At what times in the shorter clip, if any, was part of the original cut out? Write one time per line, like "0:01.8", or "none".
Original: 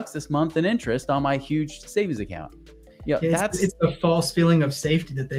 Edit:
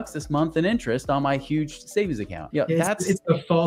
0:02.3

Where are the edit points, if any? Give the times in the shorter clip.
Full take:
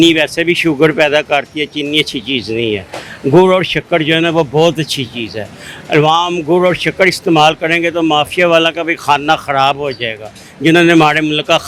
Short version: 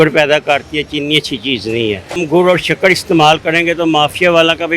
0:02.1

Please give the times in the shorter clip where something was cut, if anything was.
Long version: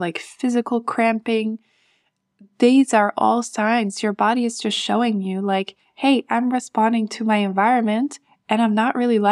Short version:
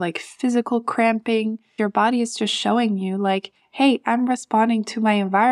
0:01.7

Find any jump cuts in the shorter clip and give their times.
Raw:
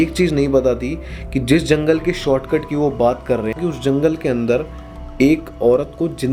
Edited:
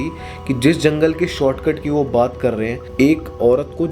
0:02.7

